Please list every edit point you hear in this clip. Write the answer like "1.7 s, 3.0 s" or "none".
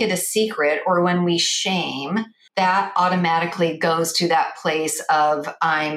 2.4 s

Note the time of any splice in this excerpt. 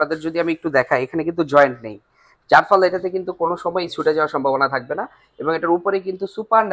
none

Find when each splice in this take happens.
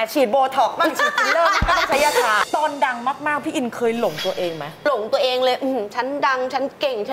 2.4 s, 4.8 s

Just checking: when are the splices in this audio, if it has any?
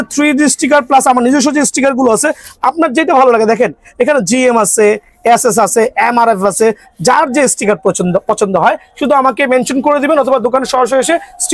none

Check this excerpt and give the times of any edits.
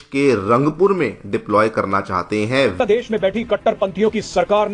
2.8 s

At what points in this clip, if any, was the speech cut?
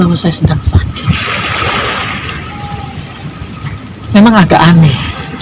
none

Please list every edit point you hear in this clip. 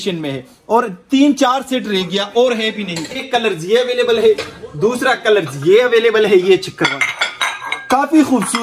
3.2 s

